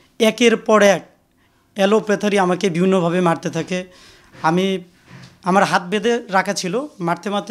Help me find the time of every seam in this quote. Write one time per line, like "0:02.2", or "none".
none